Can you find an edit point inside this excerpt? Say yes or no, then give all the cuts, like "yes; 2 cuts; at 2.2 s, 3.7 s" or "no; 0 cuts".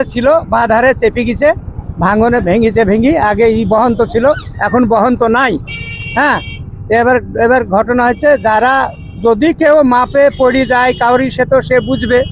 no; 0 cuts